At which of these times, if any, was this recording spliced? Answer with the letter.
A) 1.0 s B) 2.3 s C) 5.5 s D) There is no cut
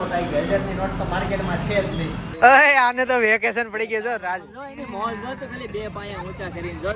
B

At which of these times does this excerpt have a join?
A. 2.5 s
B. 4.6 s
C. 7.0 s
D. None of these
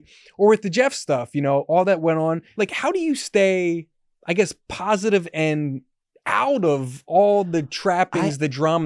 A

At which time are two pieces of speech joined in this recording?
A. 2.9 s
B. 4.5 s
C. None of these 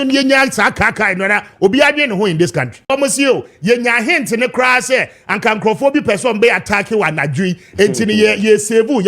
A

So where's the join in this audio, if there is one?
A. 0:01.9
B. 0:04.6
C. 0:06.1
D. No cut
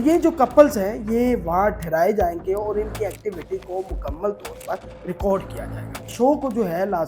C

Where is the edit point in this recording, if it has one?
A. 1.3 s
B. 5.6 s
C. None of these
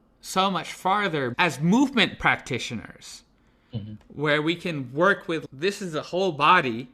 A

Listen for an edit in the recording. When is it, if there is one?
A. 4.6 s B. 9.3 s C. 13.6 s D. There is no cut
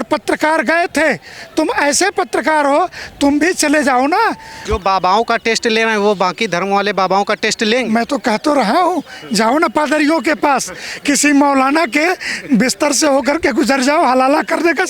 A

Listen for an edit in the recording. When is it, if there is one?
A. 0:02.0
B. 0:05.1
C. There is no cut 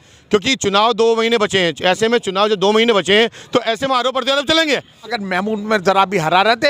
B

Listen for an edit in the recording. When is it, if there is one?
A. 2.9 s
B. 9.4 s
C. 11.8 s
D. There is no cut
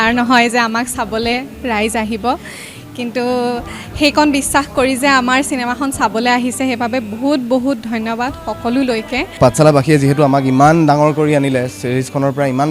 B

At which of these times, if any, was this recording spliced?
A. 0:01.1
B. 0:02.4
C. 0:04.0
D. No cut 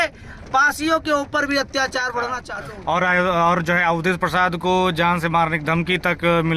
B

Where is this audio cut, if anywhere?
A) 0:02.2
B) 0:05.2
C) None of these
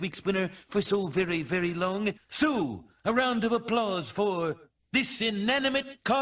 A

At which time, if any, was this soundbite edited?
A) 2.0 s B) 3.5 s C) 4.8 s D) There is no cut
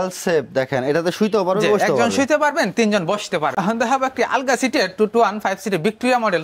B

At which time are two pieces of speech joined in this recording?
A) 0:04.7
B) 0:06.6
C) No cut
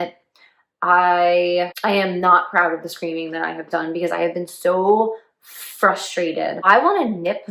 B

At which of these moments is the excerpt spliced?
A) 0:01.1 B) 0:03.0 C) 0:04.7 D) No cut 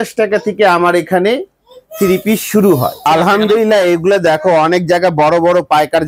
B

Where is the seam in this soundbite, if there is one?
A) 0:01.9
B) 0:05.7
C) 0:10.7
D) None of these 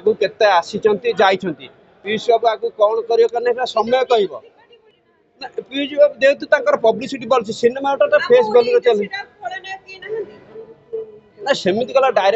D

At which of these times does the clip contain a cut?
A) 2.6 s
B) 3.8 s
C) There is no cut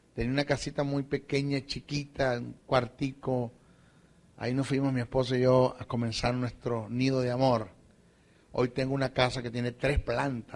B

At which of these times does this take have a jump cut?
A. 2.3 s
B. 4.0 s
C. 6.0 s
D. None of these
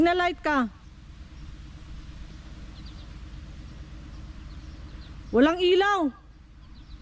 A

